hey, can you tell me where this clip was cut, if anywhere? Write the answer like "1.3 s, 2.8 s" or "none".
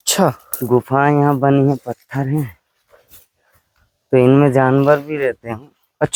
none